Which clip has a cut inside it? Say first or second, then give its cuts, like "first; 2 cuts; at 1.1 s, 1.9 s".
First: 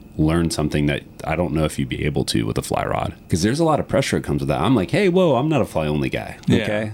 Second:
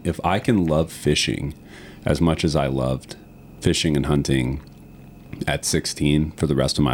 first; 1 cut; at 3.2 s